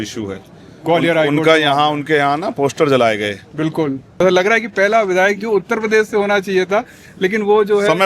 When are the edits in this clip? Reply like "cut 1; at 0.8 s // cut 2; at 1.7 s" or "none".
cut 1; at 4.2 s